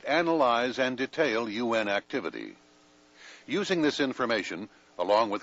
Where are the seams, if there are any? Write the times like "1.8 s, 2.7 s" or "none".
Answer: 2.1 s